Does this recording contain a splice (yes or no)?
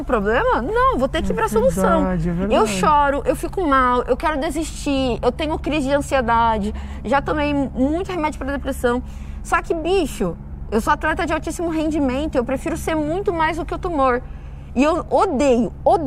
no